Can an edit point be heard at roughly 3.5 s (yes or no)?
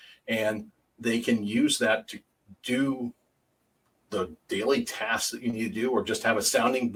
no